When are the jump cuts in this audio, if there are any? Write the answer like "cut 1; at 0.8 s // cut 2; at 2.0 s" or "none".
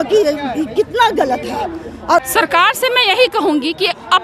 cut 1; at 2.2 s